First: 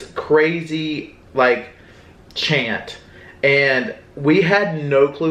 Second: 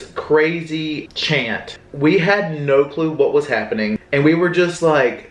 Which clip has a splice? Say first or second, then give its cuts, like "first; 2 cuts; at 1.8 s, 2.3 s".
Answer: second; 2 cuts; at 1.4 s, 4.0 s